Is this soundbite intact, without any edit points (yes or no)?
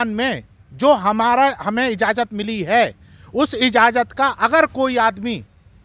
yes